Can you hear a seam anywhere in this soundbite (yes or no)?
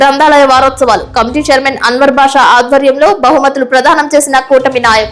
no